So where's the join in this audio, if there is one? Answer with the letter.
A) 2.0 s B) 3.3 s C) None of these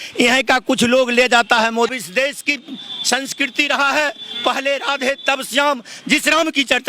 A